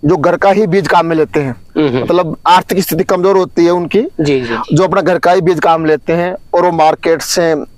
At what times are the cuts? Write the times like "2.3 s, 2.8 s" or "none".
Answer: none